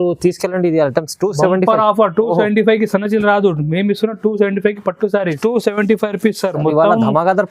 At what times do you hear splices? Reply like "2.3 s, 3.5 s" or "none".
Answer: 5.4 s